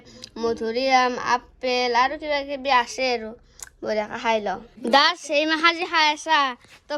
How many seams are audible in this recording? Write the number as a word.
zero